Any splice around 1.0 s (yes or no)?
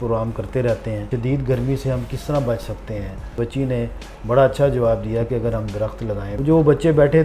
yes